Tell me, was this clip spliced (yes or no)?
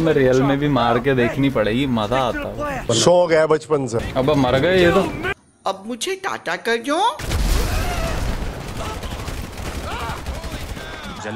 yes